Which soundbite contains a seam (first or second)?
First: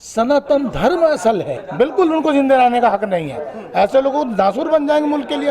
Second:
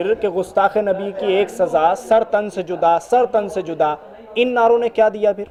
first